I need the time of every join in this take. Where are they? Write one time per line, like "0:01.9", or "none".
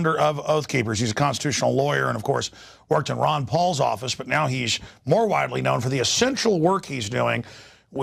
none